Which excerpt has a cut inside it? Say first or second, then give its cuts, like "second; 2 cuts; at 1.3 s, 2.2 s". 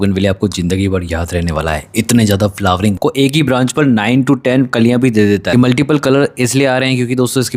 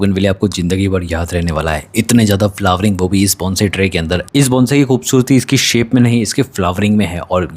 first; 2 cuts; at 3.0 s, 5.5 s